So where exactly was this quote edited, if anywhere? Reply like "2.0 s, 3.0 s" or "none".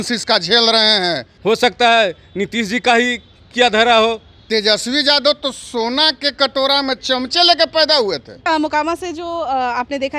1.3 s, 4.3 s, 8.5 s